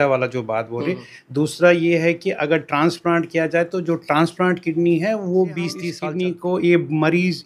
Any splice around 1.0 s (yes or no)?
no